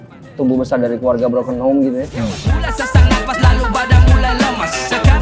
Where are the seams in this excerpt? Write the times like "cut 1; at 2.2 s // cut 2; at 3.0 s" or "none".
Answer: cut 1; at 2.4 s